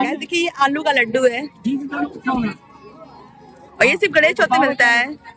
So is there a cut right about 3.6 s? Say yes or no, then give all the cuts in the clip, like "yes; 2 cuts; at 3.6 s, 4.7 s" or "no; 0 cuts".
yes; 1 cut; at 3.6 s